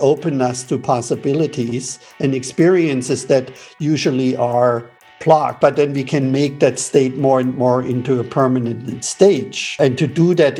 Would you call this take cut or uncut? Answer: cut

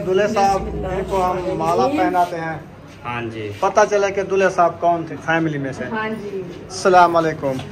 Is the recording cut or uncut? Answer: uncut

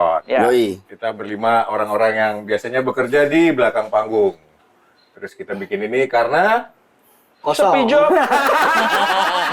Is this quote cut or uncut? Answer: uncut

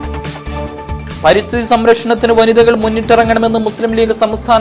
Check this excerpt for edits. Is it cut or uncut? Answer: cut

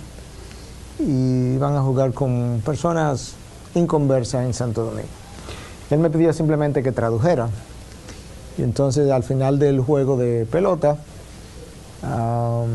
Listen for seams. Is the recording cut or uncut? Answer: uncut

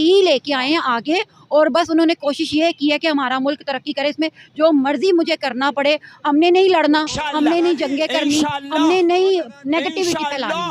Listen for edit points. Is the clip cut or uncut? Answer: uncut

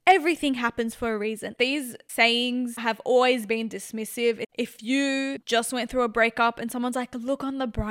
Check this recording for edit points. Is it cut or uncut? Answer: cut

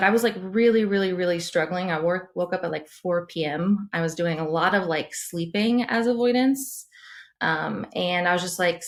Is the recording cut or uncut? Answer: uncut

